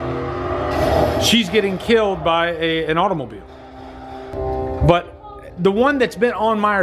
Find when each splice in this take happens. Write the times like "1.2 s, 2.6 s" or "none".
4.3 s